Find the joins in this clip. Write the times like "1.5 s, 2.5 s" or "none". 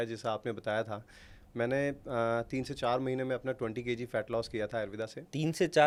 none